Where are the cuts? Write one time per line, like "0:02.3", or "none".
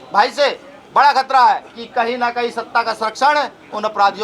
0:01.8